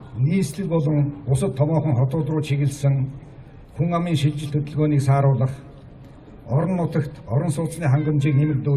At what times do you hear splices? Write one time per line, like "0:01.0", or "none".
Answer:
0:07.2